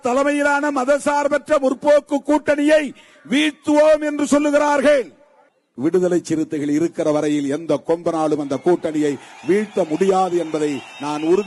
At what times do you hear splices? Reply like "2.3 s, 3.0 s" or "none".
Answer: none

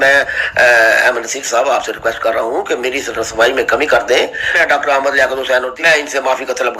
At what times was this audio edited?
4.6 s, 5.7 s

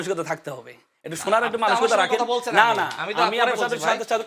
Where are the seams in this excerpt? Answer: none

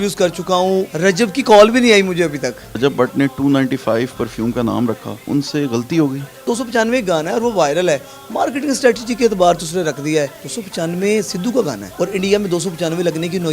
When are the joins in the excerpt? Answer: 0.9 s, 2.8 s, 5.2 s, 6.4 s, 10.4 s, 11.8 s

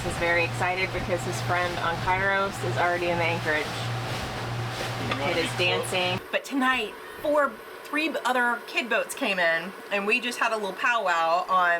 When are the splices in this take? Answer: 6.2 s

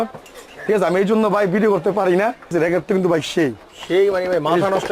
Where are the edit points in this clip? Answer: 2.5 s

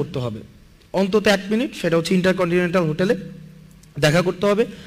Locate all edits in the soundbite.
none

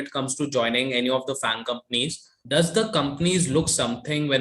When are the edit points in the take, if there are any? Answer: 2.3 s

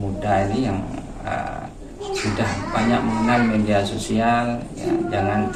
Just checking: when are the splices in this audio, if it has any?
none

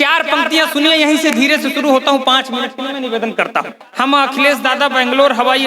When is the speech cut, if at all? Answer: 3.8 s

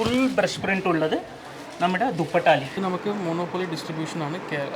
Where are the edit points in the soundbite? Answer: 2.8 s

